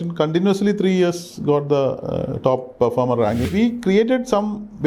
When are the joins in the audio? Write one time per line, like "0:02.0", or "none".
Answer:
0:03.5